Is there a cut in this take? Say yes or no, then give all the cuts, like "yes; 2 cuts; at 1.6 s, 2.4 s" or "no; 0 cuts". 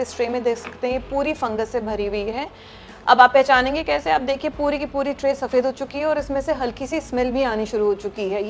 no; 0 cuts